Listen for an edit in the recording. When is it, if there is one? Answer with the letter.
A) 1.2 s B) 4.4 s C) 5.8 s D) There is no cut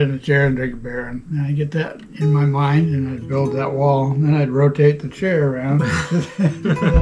A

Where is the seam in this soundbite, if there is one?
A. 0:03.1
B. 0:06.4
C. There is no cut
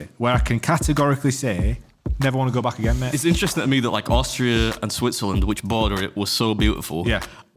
A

